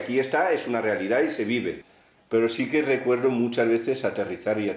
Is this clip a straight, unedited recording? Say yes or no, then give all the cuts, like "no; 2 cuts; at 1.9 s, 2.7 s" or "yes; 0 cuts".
no; 1 cut; at 1.8 s